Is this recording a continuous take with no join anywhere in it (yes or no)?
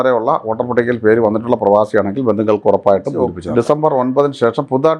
no